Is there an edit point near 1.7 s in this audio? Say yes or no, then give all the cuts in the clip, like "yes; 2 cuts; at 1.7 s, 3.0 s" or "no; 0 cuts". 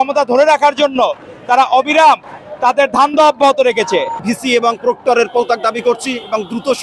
no; 1 cut; at 4.2 s